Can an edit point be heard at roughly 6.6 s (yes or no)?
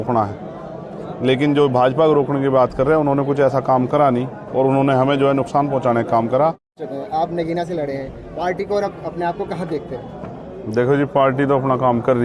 no